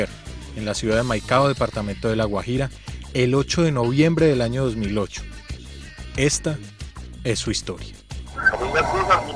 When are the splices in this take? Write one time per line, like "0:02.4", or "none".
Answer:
none